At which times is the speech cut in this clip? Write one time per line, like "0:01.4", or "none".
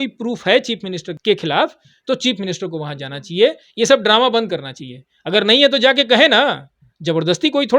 0:01.1